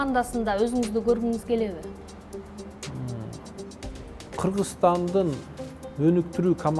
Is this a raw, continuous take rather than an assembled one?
yes; 0 cuts

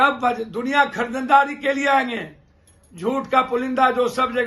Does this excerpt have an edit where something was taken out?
no; 0 cuts

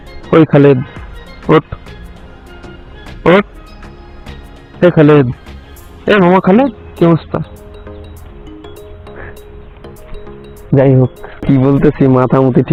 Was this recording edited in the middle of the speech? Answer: no; 0 cuts

